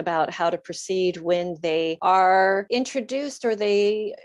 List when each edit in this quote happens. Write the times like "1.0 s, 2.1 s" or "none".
2.0 s, 2.7 s